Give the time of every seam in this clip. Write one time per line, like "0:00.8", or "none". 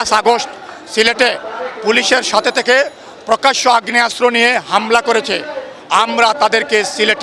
none